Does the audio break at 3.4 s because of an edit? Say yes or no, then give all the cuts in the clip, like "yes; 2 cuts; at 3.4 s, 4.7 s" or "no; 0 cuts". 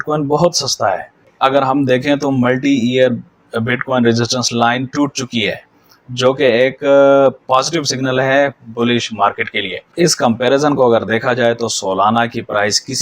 no; 2 cuts; at 1.3 s, 9.9 s